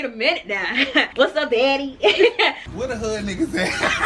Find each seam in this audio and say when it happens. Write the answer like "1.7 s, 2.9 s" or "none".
1.1 s, 2.7 s